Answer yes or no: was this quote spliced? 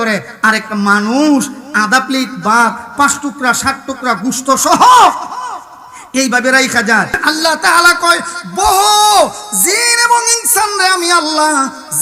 yes